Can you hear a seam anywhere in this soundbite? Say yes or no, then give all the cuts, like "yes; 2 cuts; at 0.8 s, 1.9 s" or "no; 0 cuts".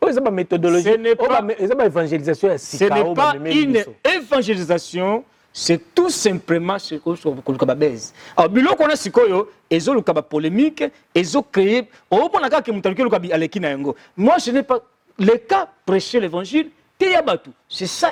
no; 0 cuts